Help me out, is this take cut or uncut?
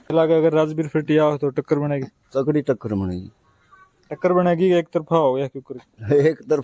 uncut